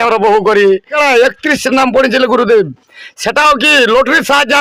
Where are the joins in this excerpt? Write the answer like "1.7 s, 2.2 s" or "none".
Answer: 0.9 s